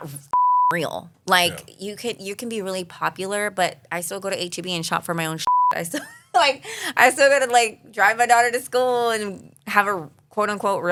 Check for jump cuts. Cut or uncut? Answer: uncut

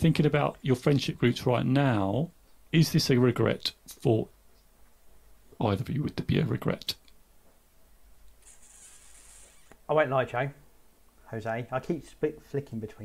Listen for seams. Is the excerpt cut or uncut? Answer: uncut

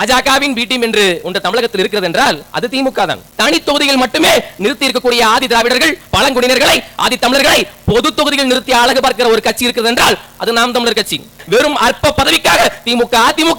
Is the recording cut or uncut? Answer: cut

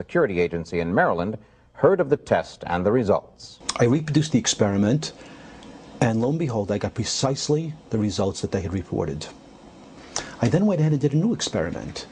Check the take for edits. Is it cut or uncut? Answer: uncut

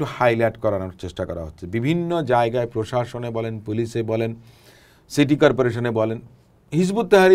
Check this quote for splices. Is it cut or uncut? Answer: uncut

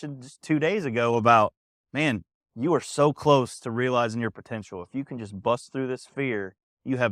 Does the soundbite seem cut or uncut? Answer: uncut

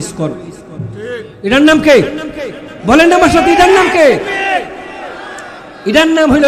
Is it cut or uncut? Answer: uncut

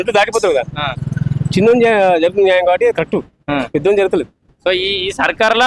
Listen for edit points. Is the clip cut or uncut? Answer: uncut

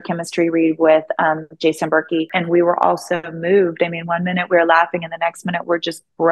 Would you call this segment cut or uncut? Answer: cut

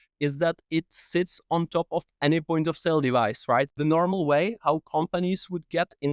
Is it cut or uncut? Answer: cut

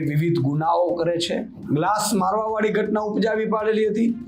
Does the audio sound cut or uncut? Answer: cut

